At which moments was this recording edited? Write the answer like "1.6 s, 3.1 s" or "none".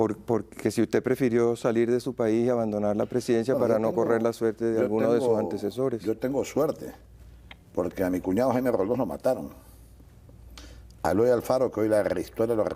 1.8 s